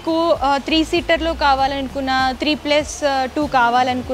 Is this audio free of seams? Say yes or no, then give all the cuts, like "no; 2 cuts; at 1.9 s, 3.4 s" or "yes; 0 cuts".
yes; 0 cuts